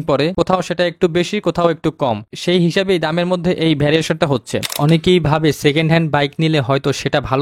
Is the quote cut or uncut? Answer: cut